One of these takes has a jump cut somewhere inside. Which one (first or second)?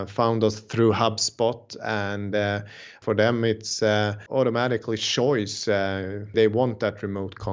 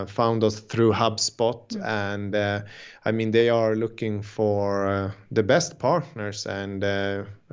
first